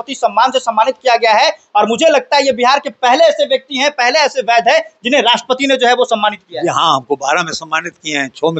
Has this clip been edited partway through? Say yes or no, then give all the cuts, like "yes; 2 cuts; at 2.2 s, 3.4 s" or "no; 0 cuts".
no; 0 cuts